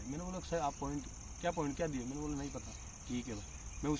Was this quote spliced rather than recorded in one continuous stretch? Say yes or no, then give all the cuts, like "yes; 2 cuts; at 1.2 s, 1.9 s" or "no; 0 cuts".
no; 0 cuts